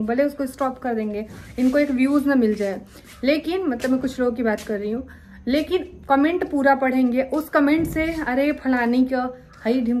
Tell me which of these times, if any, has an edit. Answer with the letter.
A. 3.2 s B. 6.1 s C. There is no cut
C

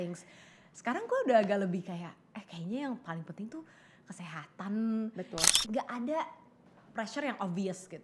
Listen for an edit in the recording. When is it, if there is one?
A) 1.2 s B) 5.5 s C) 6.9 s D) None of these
B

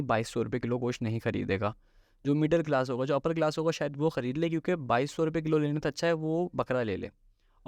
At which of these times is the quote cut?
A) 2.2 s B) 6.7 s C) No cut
C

